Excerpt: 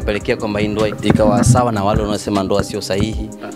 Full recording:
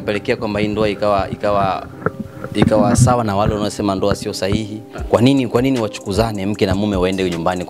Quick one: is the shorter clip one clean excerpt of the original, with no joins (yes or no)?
no